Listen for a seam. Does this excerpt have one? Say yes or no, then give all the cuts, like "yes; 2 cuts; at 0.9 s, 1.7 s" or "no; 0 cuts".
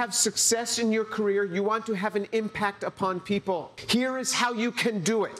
yes; 1 cut; at 3.8 s